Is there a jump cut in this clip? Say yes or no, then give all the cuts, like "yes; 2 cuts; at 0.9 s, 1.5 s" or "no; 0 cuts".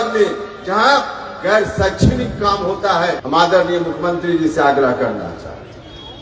yes; 1 cut; at 3.2 s